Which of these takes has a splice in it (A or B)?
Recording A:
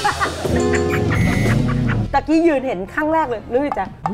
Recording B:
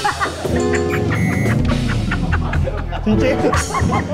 A